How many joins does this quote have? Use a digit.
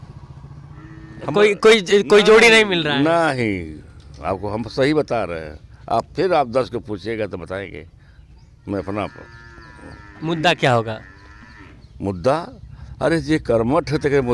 0